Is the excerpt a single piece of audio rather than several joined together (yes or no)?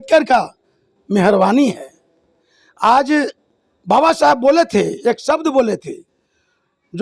yes